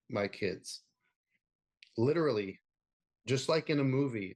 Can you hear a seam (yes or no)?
no